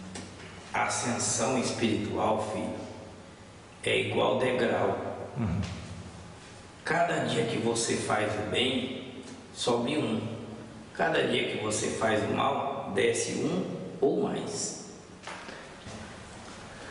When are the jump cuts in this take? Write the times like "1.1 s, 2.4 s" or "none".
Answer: 15.9 s